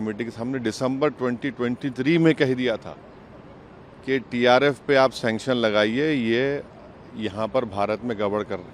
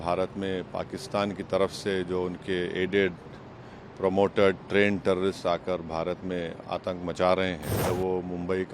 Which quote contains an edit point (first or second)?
second